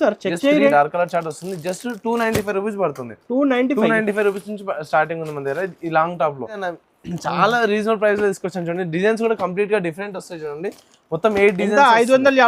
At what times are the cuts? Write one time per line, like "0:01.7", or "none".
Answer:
0:00.7
0:06.7